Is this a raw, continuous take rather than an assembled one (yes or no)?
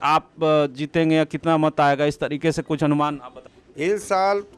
yes